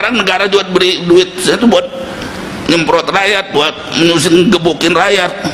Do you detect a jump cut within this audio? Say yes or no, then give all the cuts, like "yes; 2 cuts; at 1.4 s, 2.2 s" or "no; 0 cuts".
no; 0 cuts